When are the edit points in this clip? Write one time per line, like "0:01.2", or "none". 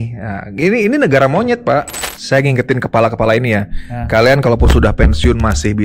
0:02.1